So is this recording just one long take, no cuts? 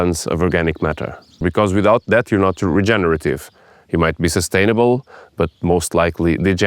no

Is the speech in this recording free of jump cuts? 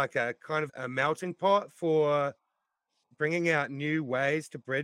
no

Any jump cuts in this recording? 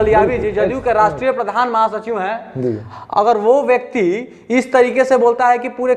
no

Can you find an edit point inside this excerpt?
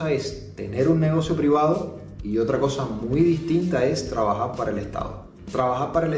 no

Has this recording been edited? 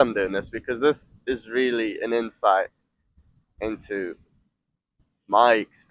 no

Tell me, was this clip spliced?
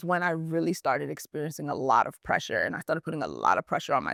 no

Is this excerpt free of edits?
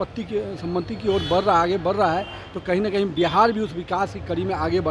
yes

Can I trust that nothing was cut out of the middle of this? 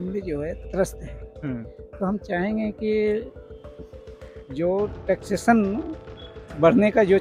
yes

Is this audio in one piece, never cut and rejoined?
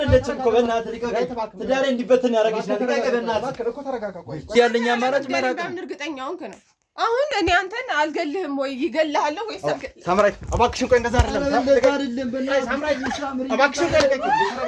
no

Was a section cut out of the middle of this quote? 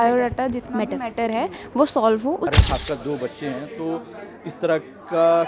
yes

